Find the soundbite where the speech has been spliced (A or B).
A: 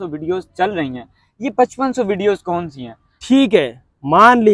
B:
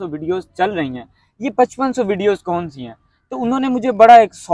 A